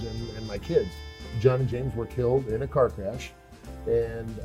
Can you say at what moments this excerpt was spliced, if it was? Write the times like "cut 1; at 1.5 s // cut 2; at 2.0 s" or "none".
cut 1; at 1.2 s